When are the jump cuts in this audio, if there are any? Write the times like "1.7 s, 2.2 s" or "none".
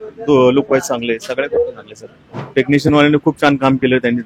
2.4 s